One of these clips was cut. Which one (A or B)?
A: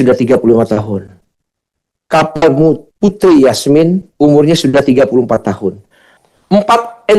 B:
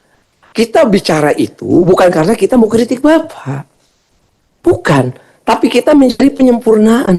A